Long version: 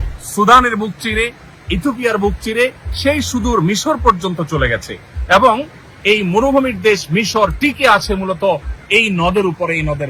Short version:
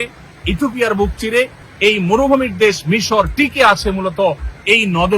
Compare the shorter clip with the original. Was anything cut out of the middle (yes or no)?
yes